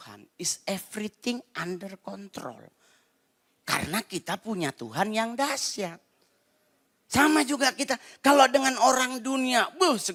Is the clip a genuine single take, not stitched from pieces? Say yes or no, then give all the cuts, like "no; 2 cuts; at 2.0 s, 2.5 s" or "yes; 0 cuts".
yes; 0 cuts